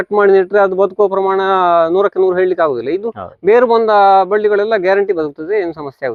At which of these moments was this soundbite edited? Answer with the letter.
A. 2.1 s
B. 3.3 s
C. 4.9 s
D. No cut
D